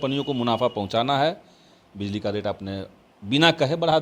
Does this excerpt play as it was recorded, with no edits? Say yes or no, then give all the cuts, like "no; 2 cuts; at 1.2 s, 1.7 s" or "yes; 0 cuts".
yes; 0 cuts